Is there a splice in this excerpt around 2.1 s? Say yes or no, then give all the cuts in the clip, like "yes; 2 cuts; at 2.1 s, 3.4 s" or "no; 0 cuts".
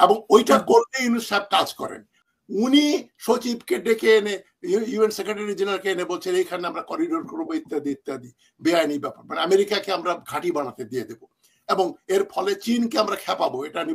yes; 1 cut; at 2.1 s